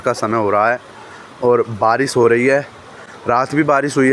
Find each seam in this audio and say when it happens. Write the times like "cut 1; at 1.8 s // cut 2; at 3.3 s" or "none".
none